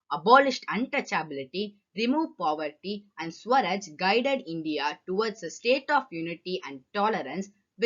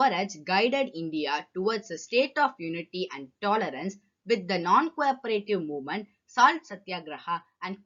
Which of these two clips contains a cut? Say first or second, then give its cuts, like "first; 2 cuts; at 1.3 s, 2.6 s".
first; 1 cut; at 1.1 s